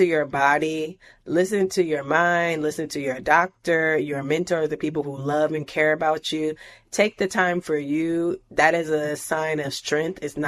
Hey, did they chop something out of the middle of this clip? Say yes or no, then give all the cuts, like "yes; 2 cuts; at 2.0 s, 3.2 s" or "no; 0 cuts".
no; 0 cuts